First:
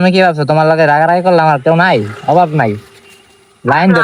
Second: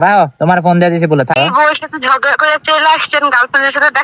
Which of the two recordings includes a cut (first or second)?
second